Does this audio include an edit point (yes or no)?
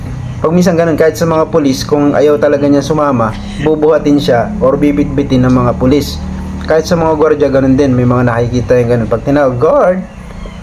no